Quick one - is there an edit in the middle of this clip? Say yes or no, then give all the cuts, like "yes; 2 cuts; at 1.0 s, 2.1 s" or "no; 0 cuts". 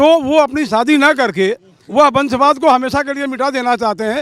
no; 0 cuts